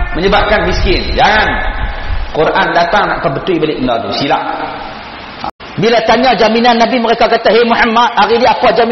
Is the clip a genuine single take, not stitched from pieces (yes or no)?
no